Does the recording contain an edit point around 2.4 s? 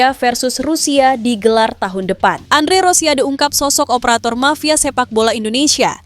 yes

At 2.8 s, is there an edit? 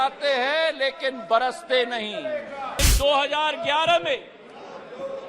yes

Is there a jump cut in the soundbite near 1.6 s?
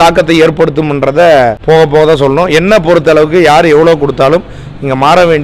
yes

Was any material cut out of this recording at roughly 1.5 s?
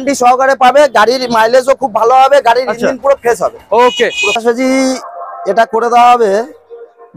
no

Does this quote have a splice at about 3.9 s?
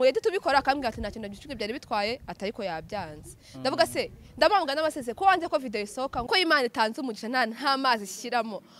no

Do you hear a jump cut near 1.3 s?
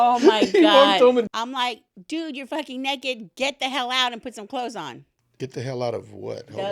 yes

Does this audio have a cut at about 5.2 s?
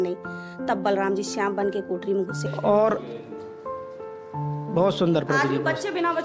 no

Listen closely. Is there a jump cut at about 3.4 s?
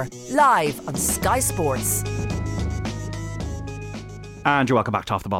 yes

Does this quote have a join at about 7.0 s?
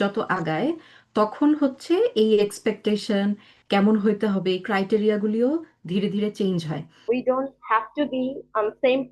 yes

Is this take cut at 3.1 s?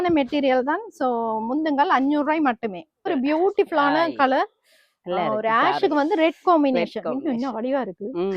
yes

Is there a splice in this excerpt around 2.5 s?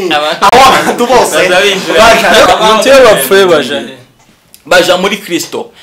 yes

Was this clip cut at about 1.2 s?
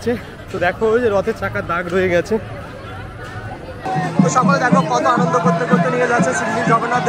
no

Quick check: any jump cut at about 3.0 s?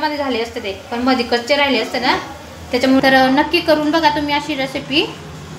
yes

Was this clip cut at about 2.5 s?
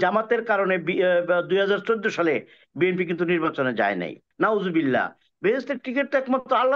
no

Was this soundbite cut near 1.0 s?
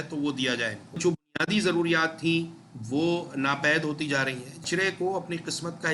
yes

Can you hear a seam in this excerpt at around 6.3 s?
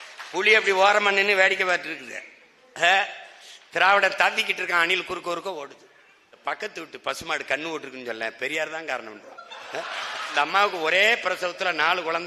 yes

